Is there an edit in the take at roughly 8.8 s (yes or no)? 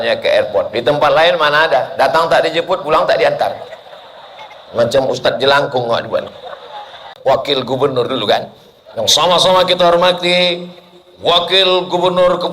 no